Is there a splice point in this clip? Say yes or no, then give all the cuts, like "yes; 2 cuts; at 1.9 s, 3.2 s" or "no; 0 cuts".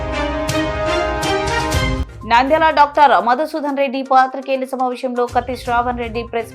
yes; 1 cut; at 2.1 s